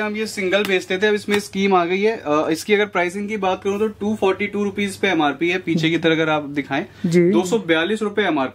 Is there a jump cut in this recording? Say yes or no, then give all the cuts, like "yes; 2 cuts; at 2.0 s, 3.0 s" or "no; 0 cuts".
no; 0 cuts